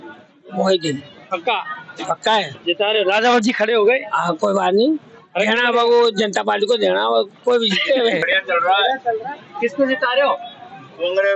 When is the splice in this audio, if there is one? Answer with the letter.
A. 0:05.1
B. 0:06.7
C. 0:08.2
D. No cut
C